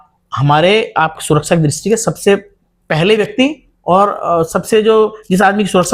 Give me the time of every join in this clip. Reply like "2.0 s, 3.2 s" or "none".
none